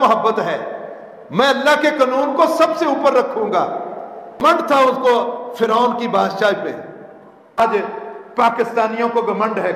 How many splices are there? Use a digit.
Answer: 2